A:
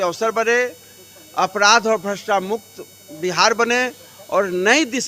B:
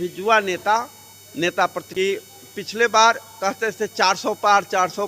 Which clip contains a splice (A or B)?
B